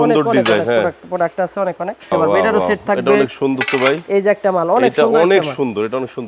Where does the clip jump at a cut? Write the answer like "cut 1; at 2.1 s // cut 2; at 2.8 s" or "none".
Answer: cut 1; at 2.1 s